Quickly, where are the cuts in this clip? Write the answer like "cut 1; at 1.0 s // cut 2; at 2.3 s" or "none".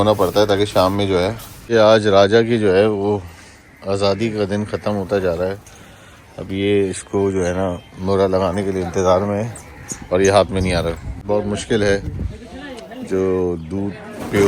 cut 1; at 1.5 s // cut 2; at 11.1 s